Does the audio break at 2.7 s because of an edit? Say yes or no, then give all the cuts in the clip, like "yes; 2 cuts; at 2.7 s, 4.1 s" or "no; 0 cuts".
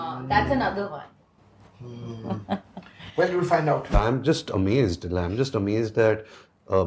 no; 1 cut; at 4.0 s